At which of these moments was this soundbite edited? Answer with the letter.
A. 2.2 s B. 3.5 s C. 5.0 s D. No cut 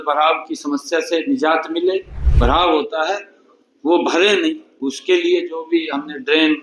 A